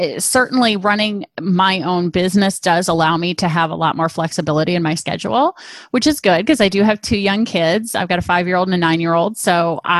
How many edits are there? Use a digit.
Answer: 0